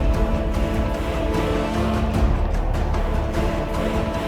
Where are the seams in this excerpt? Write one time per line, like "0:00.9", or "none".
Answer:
none